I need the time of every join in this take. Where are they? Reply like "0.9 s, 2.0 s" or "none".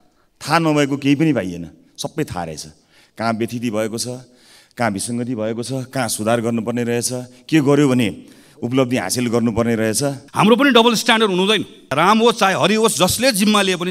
10.2 s, 11.9 s